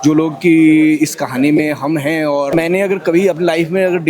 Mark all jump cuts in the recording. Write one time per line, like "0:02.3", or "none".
0:02.5